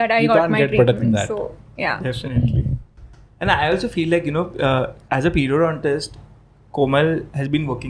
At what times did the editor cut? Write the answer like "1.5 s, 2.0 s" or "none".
none